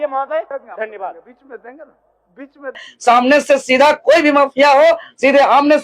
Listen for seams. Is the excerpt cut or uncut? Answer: cut